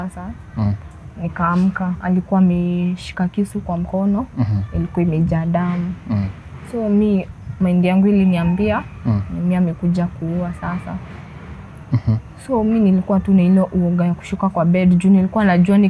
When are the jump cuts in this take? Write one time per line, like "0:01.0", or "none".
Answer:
0:02.0